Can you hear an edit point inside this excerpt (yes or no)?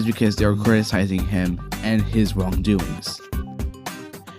yes